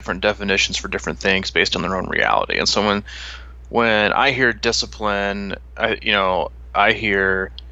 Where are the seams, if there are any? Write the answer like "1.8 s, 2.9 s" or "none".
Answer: none

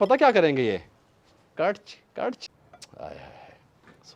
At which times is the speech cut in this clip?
2.4 s

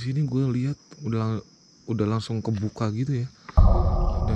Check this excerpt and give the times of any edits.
3.4 s

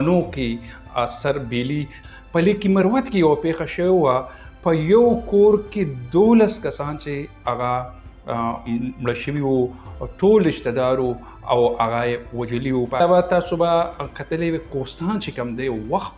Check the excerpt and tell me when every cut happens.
2.0 s, 13.0 s

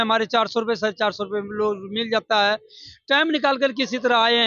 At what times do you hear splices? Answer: none

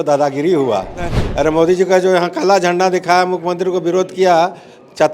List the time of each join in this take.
1.2 s

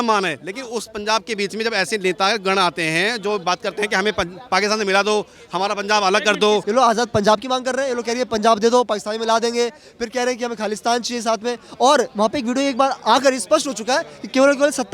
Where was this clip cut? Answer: 6.7 s

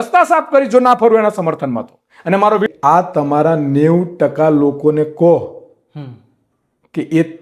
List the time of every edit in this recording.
2.7 s

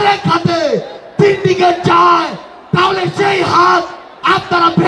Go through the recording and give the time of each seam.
none

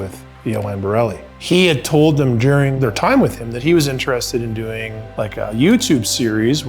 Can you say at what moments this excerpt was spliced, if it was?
1.3 s, 2.7 s, 5.0 s

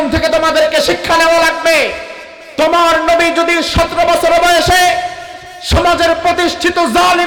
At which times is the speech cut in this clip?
none

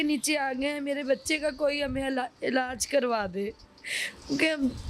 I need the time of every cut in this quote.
none

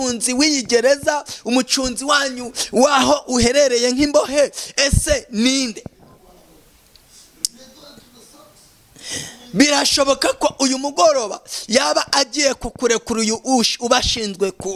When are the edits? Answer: none

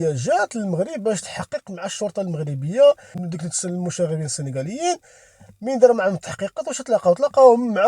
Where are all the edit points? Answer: 3.3 s

